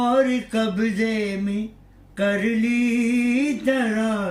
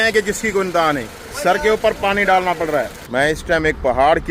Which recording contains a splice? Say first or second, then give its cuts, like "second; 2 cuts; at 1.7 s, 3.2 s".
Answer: second; 1 cut; at 3.0 s